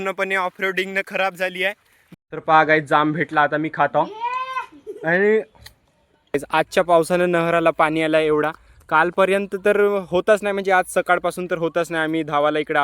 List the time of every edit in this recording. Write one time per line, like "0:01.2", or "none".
0:02.1
0:06.4

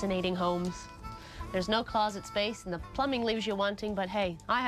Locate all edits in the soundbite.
0:03.1

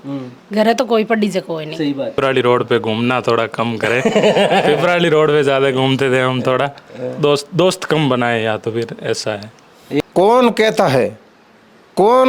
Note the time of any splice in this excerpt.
0:02.1
0:10.0

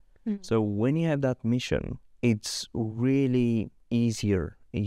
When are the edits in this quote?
0:02.0
0:03.8

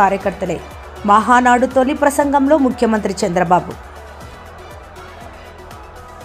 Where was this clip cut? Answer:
none

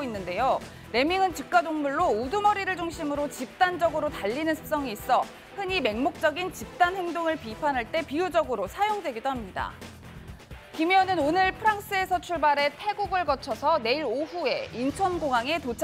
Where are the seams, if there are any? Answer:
0:10.2

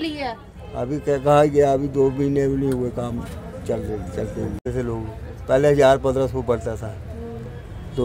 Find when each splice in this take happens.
0:04.6

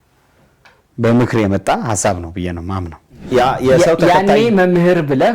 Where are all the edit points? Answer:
0:03.2

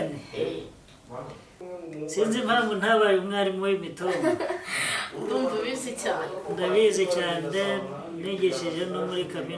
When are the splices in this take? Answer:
0:01.6

